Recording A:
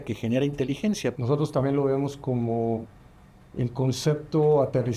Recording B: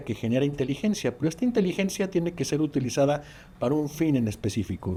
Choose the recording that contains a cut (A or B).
A